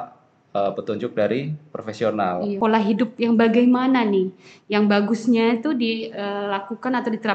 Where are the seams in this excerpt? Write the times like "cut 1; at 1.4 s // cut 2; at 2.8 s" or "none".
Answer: cut 1; at 2.5 s